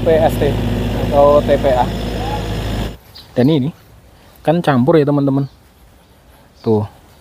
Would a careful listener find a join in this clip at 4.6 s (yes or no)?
no